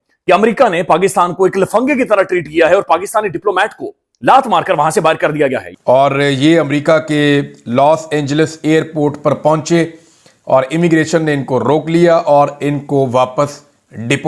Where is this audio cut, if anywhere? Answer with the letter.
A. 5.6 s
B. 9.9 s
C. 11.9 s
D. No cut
A